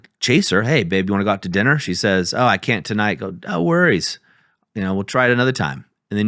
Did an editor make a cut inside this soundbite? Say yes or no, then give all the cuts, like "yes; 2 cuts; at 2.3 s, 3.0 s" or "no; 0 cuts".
no; 0 cuts